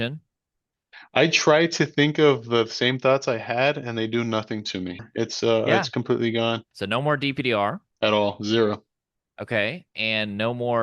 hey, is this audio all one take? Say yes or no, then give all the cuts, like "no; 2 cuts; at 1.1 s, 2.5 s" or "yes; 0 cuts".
no; 3 cuts; at 5.0 s, 6.7 s, 7.9 s